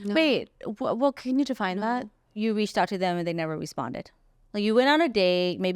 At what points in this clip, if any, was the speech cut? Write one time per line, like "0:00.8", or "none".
0:02.3